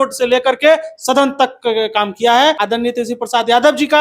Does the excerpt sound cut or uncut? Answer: cut